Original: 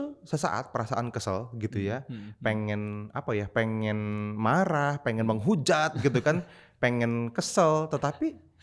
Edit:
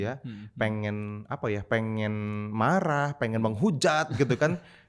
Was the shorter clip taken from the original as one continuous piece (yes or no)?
yes